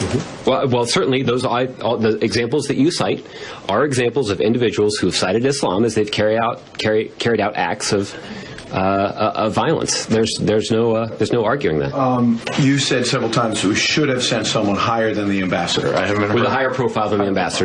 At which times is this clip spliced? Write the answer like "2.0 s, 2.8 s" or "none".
10.3 s